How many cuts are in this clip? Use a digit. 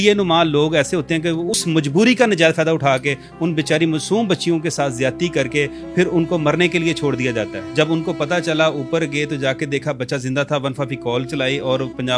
2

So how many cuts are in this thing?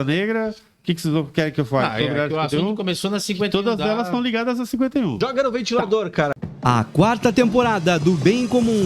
2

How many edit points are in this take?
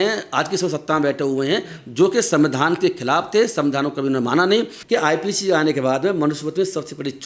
1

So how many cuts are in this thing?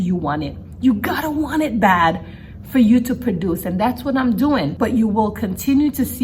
1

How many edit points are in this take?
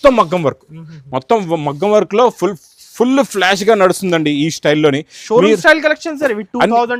0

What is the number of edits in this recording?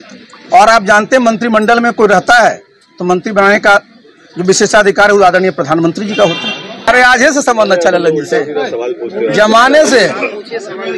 1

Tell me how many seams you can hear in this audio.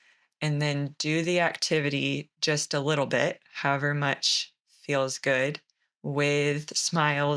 0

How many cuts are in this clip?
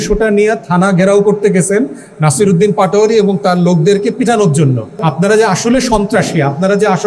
1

